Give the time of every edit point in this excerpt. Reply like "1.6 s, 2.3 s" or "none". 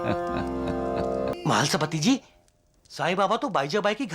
1.3 s